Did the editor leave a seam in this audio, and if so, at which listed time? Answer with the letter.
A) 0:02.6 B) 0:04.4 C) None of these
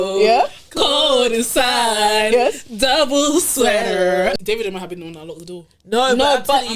B